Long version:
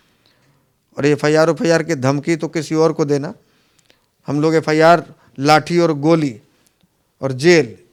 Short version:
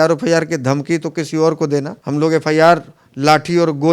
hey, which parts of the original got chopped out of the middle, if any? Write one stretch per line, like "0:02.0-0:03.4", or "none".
0:03.3-0:04.2